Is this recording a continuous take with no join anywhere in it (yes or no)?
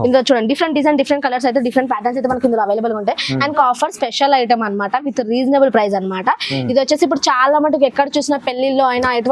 no